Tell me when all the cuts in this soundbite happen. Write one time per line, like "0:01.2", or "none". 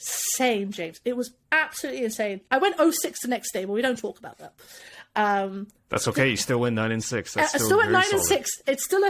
none

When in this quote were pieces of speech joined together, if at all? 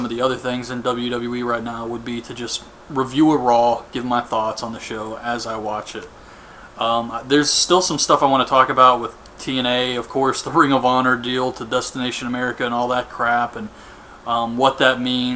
none

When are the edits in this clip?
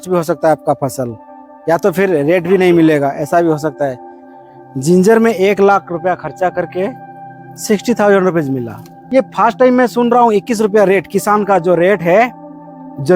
0:04.1
0:08.9

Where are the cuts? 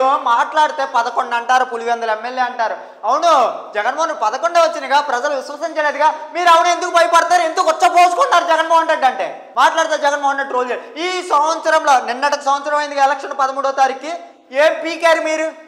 none

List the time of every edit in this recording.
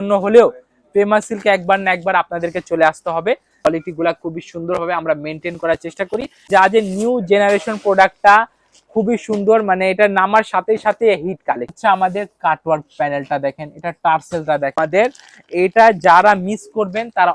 0:03.7
0:06.5
0:11.7
0:14.7

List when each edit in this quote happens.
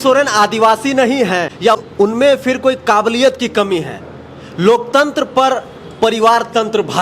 0:01.8

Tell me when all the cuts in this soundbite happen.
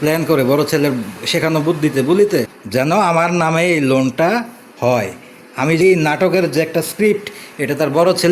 0:02.6
0:05.8

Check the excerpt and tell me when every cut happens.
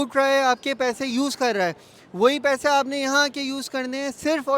none

